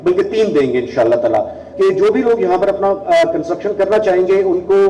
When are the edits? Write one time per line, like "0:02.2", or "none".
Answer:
0:01.6